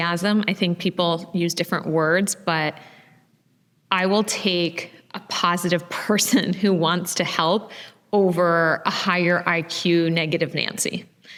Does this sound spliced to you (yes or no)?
no